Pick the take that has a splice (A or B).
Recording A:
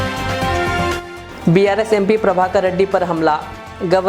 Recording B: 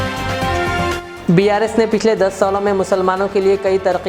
A